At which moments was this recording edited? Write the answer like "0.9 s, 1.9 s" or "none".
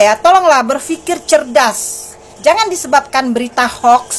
none